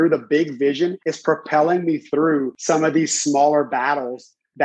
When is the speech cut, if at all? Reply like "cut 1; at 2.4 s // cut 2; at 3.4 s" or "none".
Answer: cut 1; at 1.1 s // cut 2; at 2.5 s